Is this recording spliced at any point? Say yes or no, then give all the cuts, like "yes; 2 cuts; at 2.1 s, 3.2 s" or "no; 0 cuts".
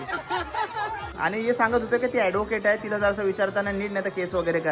yes; 1 cut; at 1.1 s